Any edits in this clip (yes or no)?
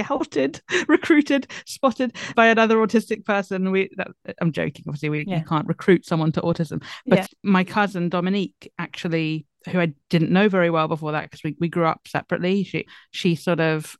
yes